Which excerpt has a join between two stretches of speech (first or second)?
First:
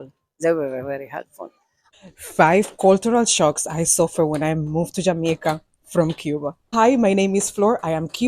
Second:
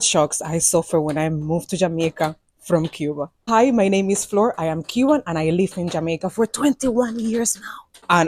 first